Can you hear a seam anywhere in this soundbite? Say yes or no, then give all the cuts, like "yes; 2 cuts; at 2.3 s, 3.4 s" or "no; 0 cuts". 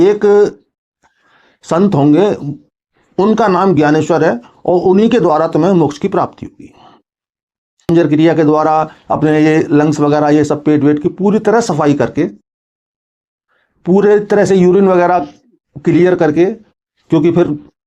yes; 1 cut; at 7.9 s